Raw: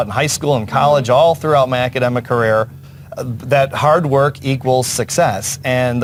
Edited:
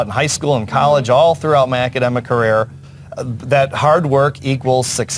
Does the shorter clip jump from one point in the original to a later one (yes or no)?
no